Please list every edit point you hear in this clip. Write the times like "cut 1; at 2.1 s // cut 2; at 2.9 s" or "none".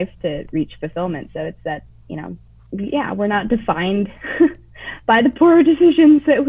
cut 1; at 2.5 s